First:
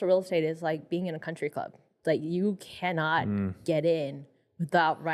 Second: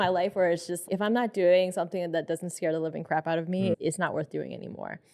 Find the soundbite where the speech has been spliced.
second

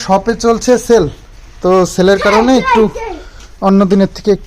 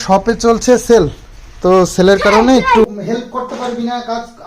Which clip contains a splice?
second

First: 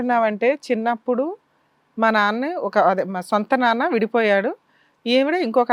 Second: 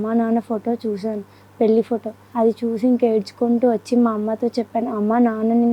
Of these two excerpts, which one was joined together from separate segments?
second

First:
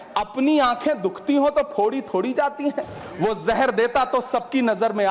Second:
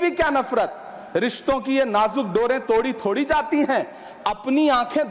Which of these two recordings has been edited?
first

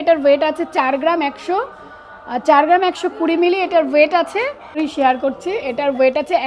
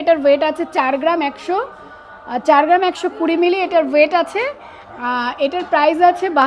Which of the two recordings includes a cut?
first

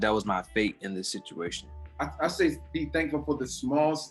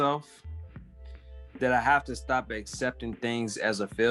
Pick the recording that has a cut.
first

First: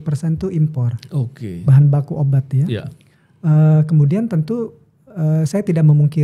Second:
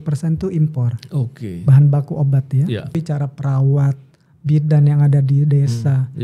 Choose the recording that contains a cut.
second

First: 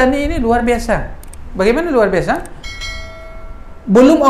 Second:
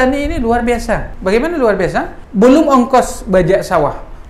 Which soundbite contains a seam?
second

